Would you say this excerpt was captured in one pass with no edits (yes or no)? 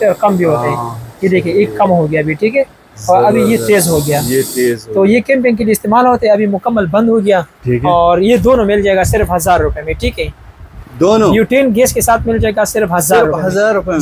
yes